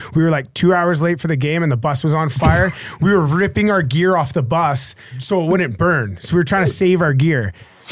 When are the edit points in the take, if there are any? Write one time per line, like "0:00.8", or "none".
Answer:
0:05.2